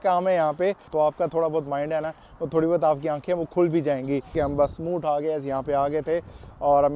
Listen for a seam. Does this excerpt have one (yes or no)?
yes